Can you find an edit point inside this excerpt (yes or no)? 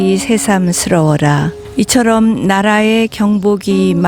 yes